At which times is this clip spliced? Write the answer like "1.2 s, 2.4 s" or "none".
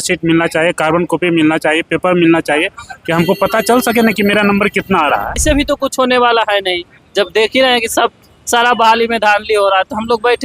5.4 s